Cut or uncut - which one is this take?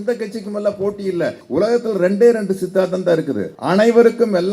cut